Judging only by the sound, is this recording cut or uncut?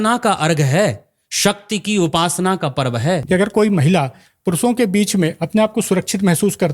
cut